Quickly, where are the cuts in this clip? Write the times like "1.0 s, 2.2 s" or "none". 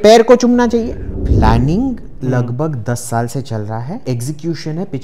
1.1 s, 4.0 s